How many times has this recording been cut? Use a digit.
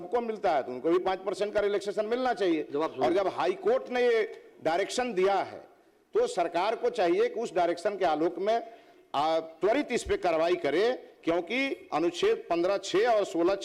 0